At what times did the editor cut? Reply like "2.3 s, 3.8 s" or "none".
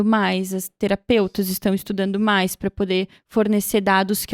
none